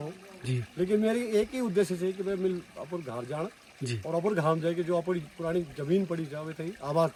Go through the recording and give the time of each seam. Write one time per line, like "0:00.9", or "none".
none